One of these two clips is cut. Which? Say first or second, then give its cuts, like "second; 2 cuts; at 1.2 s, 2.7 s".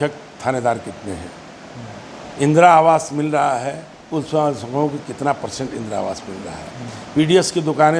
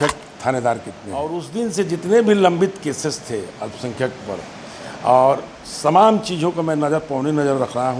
second; 1 cut; at 1.4 s